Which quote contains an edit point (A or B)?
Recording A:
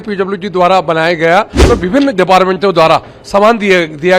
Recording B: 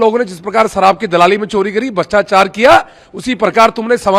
A